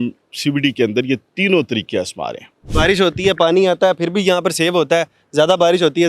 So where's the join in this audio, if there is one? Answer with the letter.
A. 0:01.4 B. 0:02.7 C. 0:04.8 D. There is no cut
B